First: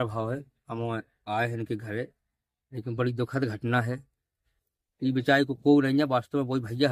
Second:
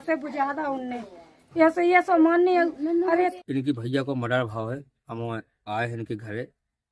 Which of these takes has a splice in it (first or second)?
second